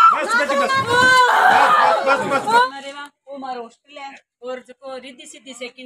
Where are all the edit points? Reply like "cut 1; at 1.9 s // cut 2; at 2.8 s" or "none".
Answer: cut 1; at 2.7 s